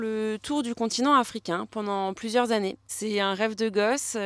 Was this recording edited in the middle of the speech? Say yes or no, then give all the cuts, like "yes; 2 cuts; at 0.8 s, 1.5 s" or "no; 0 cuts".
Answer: yes; 1 cut; at 2.8 s